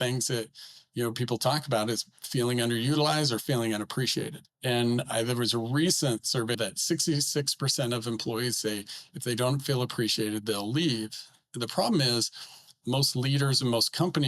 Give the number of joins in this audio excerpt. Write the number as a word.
three